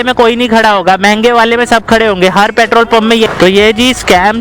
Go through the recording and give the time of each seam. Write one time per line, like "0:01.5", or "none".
0:03.3